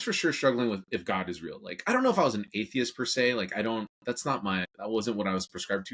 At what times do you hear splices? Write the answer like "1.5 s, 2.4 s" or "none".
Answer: 4.7 s

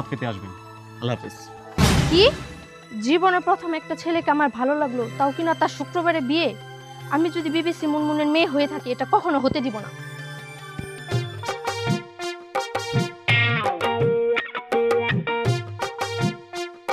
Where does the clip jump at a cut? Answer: none

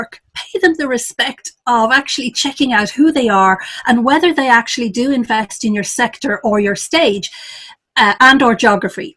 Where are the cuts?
none

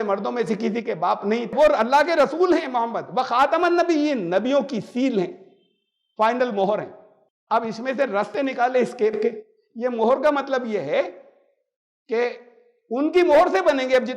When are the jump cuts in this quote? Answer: 1.5 s

